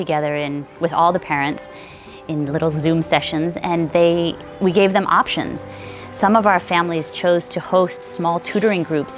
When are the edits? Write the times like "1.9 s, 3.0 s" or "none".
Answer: none